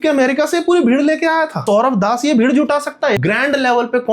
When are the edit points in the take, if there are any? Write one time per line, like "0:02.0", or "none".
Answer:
0:01.6
0:03.2